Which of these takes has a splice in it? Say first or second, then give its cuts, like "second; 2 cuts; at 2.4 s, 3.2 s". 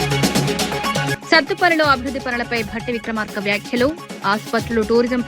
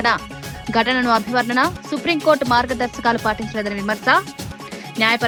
first; 1 cut; at 1.1 s